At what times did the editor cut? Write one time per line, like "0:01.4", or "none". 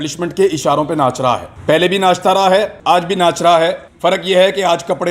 0:01.5
0:02.7
0:03.9